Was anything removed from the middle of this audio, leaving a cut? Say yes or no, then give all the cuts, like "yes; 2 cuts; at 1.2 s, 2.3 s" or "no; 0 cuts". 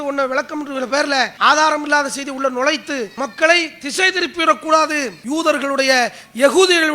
yes; 3 cuts; at 1.3 s, 3.1 s, 5.1 s